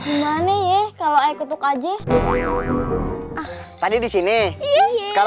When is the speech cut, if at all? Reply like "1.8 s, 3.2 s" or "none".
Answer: 3.2 s